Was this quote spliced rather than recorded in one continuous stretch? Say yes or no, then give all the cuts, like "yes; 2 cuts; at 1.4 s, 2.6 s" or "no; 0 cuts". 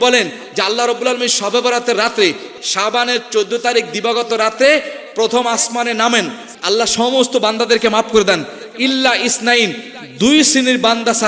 yes; 2 cuts; at 2.5 s, 6.5 s